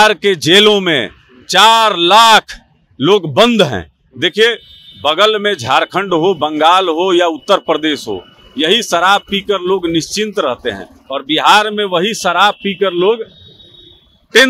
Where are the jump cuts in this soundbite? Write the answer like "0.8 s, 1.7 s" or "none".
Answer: none